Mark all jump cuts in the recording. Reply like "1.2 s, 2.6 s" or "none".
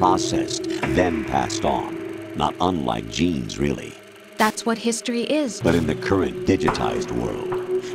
5.5 s